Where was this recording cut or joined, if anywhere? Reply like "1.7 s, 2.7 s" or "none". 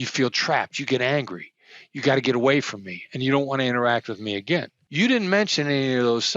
4.8 s